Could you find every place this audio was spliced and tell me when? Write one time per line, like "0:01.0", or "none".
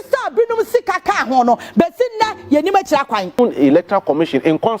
0:03.4